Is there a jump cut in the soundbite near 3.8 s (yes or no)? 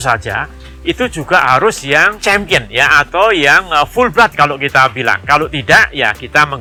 no